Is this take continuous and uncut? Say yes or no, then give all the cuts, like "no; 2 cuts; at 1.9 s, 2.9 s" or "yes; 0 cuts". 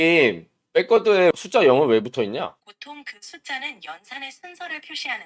no; 1 cut; at 2.7 s